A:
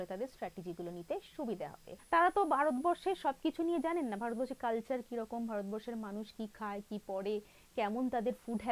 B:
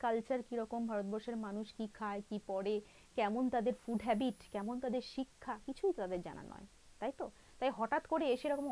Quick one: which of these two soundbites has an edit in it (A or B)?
A